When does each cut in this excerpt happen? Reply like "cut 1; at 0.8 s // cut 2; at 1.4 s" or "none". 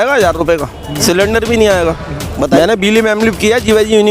cut 1; at 1.0 s // cut 2; at 2.5 s